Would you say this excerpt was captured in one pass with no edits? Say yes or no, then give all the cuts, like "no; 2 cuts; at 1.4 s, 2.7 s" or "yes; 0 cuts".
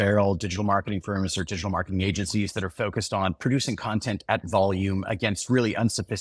yes; 0 cuts